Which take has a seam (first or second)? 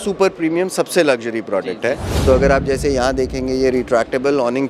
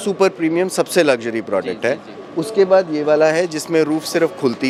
first